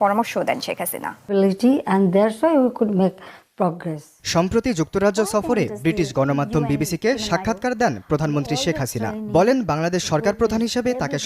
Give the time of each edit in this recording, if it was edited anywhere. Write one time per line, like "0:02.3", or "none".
0:01.1